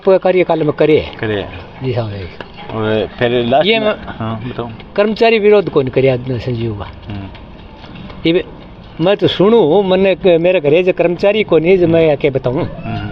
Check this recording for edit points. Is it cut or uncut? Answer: uncut